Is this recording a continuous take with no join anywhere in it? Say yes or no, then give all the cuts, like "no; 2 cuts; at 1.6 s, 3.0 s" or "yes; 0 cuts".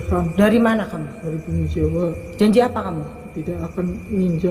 yes; 0 cuts